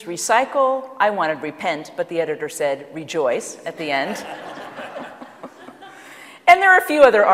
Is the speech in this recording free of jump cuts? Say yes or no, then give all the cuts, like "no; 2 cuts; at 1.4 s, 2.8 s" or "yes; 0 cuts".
no; 1 cut; at 4.8 s